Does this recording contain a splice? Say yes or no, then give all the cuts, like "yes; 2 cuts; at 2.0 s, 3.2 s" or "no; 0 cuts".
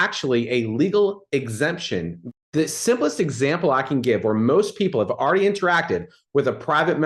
yes; 1 cut; at 2.2 s